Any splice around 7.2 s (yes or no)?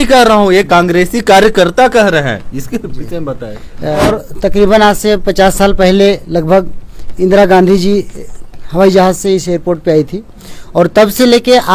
no